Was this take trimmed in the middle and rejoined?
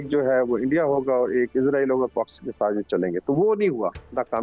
no; 0 cuts

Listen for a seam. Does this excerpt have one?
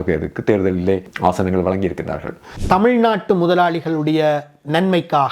yes; 2 cuts; at 1.1 s, 2.5 s

